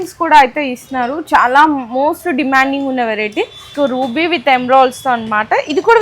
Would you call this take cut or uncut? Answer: cut